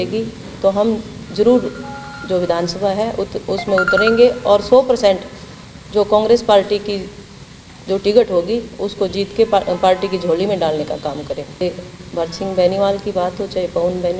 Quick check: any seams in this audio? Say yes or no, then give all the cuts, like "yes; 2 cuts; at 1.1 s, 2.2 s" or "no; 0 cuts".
yes; 1 cut; at 11.6 s